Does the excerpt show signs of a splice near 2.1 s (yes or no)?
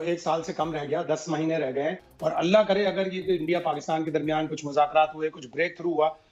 yes